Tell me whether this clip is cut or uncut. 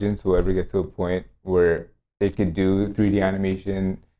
uncut